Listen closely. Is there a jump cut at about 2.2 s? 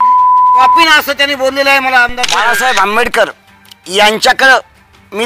yes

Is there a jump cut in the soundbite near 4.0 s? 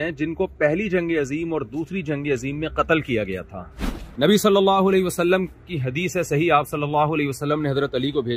yes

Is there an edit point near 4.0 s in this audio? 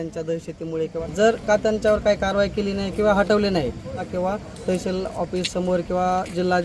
yes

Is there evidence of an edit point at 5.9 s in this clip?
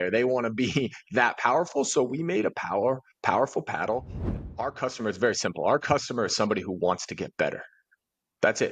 no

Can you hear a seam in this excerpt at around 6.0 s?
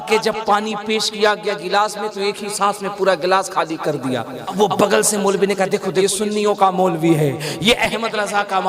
yes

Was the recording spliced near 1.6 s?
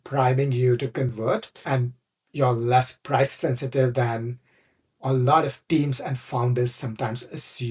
yes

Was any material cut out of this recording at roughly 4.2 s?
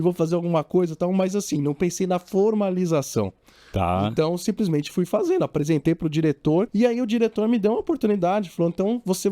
no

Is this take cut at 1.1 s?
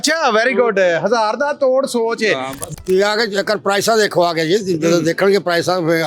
no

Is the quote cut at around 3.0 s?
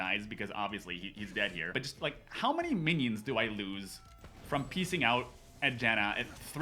no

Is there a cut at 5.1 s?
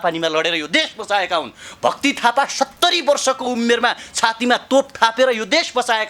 no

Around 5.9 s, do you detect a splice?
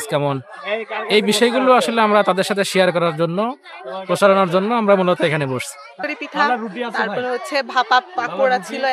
yes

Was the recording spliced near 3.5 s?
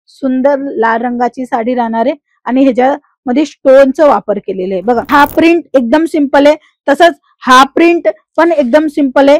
no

